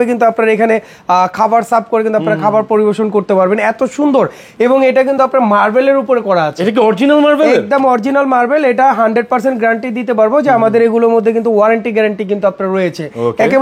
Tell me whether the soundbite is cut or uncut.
uncut